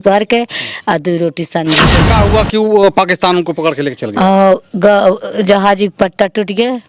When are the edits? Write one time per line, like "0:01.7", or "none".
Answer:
0:02.0